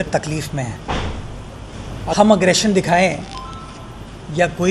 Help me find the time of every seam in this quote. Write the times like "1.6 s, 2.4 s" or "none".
2.1 s

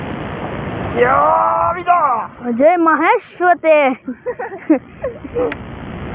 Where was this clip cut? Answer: none

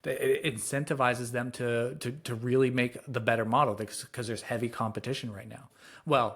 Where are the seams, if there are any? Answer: none

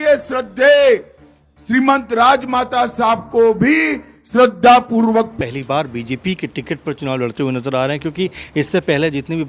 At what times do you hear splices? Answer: 5.3 s

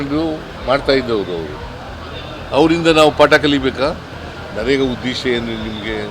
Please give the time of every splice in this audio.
4.1 s

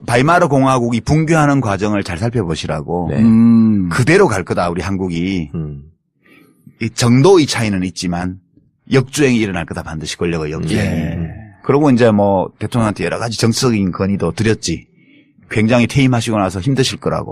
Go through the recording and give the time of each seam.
8.2 s

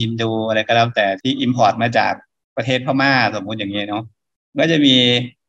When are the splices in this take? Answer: 1.2 s

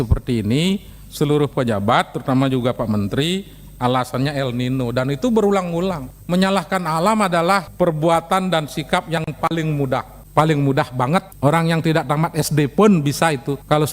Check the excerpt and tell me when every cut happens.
6.1 s

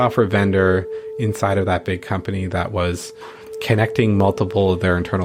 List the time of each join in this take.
none

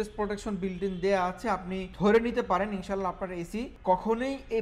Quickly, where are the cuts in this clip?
1.8 s, 3.7 s

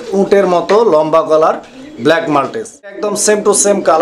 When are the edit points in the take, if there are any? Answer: 3.0 s

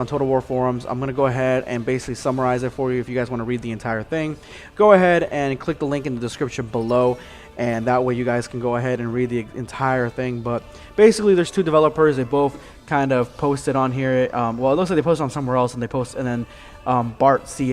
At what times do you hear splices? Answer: none

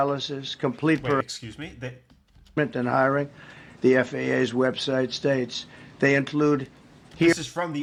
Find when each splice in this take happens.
none

